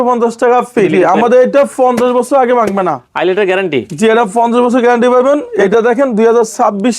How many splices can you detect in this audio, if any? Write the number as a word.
two